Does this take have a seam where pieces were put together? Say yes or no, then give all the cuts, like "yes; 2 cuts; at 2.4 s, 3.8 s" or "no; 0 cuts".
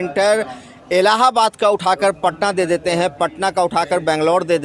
no; 0 cuts